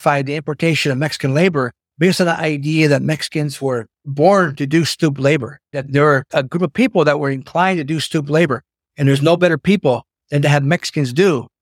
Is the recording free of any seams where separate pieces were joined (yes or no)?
no